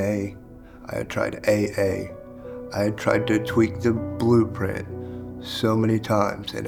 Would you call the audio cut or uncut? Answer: uncut